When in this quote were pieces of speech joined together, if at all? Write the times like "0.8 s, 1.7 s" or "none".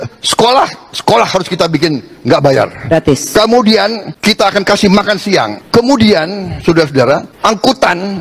4.1 s, 5.6 s, 7.3 s